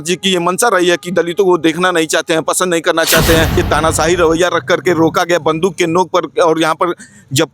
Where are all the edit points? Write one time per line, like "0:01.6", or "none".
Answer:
0:03.6